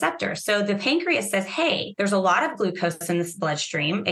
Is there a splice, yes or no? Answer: yes